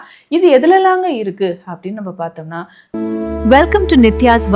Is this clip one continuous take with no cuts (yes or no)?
no